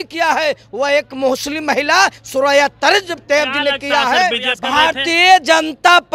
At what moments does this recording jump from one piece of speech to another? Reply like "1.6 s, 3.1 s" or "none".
4.5 s